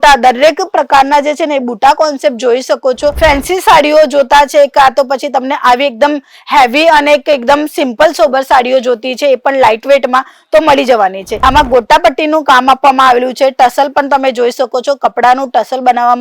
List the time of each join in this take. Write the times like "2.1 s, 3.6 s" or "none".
3.2 s, 11.3 s